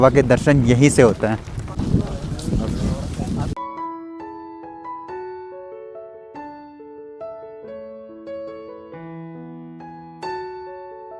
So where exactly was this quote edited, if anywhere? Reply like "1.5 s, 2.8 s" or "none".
none